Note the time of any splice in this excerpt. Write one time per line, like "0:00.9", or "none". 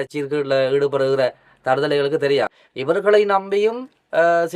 0:02.6